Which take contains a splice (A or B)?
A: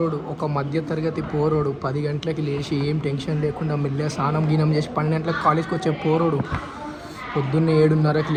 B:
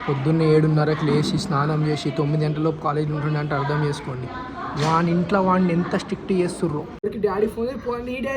B